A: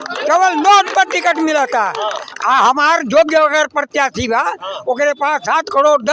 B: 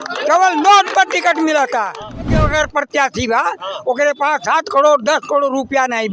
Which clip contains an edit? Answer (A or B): B